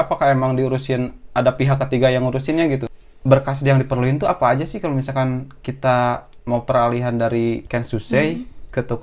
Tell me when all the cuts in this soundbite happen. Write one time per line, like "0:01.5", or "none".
0:02.9
0:07.7